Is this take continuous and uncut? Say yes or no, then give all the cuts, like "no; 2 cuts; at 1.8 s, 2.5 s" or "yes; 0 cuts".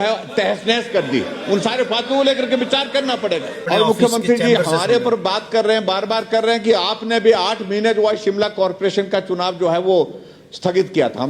no; 1 cut; at 3.5 s